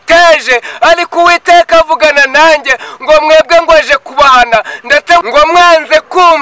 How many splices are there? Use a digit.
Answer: 1